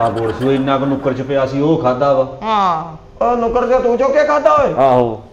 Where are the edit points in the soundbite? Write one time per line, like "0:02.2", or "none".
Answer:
none